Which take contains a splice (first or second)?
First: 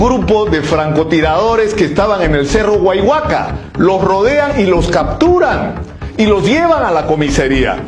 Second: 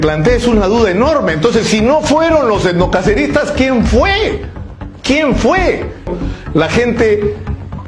second